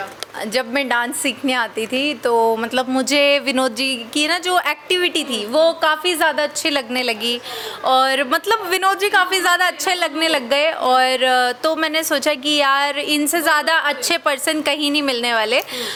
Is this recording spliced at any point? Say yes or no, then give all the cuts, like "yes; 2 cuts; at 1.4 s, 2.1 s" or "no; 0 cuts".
no; 0 cuts